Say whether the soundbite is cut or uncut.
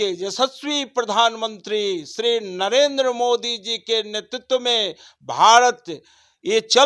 uncut